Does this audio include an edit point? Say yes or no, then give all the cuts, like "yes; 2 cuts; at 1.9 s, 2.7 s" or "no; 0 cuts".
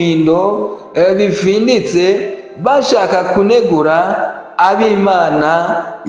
no; 0 cuts